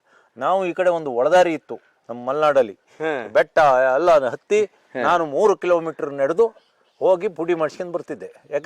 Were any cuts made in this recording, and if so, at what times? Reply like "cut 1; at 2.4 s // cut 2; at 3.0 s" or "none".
cut 1; at 2.8 s